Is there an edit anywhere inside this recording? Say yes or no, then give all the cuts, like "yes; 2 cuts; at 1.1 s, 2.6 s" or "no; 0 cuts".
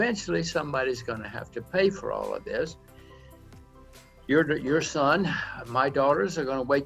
no; 0 cuts